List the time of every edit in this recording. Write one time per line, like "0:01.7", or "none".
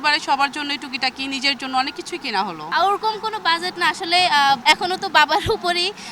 0:02.6

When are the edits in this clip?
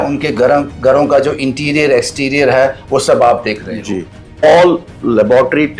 0:04.4

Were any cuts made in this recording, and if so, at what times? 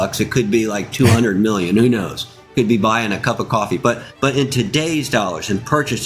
0:04.1

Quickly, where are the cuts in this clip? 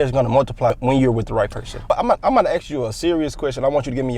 0:01.8

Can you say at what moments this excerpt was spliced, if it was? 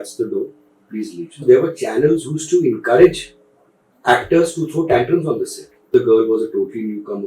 0:01.4
0:05.8

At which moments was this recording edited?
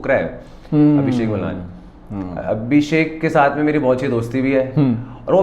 none

